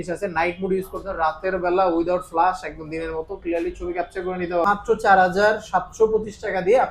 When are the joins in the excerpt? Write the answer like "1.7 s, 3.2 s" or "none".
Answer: 4.6 s